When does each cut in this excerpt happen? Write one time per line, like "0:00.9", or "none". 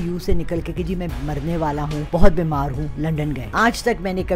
0:02.0
0:03.4